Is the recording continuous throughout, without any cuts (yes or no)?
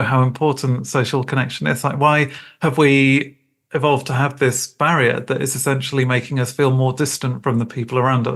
yes